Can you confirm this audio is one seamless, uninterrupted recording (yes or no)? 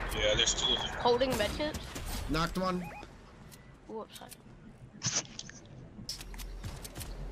no